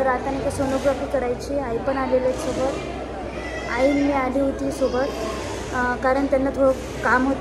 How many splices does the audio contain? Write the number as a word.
zero